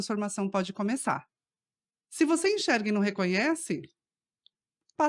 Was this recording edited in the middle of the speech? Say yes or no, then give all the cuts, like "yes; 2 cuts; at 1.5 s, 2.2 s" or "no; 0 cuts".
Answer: no; 0 cuts